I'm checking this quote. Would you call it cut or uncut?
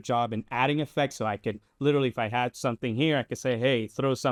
uncut